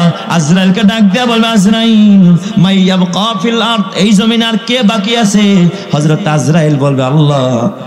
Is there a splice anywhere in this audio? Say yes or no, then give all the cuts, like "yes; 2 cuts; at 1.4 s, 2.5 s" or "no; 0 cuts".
no; 0 cuts